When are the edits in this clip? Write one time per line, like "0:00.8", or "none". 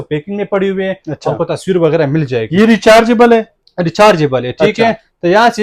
none